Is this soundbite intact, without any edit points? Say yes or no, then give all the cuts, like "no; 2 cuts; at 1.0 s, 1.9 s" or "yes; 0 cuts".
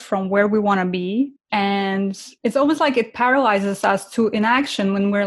no; 2 cuts; at 1.4 s, 2.3 s